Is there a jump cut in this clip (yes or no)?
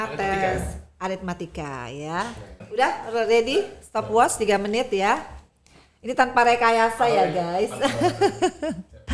yes